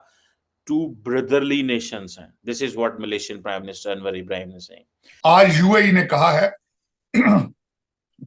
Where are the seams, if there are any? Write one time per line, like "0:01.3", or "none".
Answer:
0:05.0